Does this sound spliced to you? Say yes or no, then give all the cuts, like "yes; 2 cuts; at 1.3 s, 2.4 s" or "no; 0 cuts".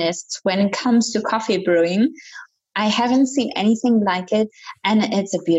yes; 1 cut; at 4.6 s